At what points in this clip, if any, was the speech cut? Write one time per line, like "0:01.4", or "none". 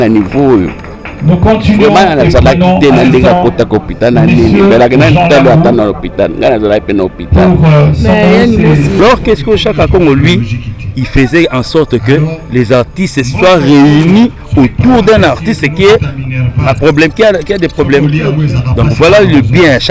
0:09.0